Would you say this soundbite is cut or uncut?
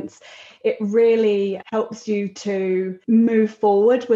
cut